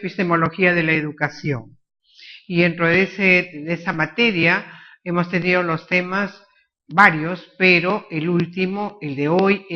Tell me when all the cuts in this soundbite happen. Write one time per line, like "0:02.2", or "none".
0:05.7